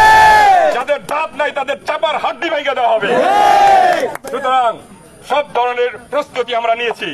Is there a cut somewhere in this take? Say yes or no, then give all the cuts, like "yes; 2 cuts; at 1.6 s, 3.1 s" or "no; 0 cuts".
no; 0 cuts